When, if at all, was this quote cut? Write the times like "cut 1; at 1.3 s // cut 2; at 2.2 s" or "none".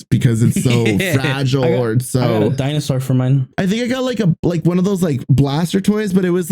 cut 1; at 3.5 s